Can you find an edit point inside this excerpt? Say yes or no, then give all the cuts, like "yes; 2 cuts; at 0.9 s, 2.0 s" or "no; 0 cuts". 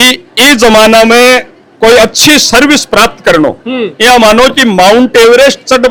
no; 0 cuts